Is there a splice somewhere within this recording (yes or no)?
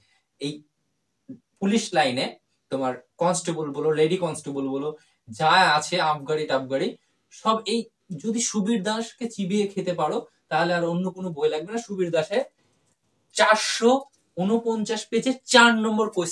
no